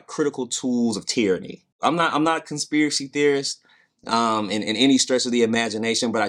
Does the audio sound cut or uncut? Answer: cut